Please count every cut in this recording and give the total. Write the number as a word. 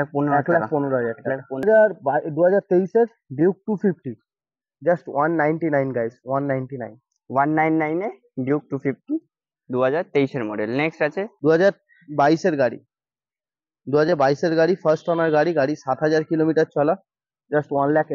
two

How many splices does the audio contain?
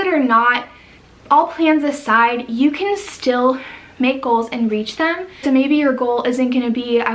one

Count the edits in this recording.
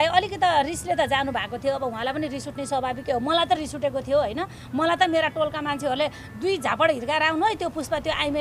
zero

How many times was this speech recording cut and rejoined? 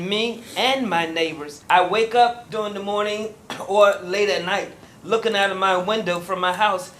two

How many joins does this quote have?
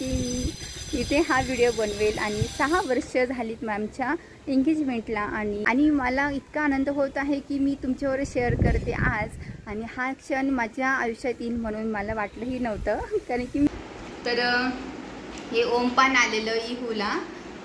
two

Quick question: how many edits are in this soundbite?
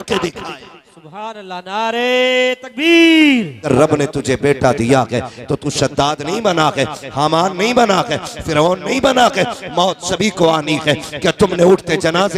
one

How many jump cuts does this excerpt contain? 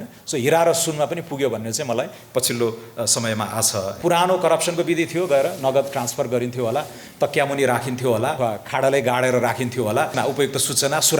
three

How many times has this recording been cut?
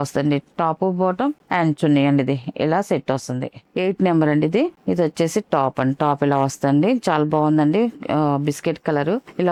zero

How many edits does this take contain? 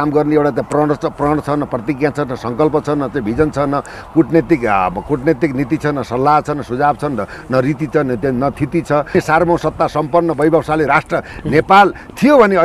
one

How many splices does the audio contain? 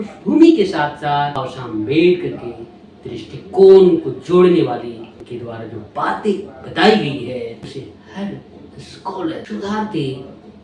four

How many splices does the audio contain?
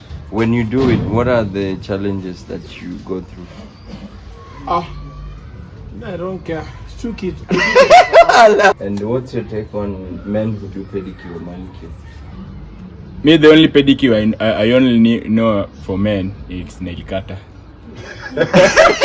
two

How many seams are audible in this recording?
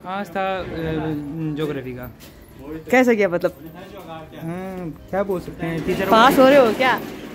zero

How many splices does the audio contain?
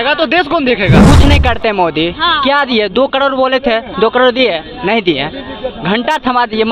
one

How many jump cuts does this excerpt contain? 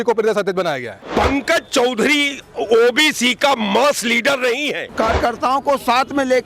one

